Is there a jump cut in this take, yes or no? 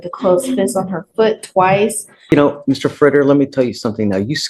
yes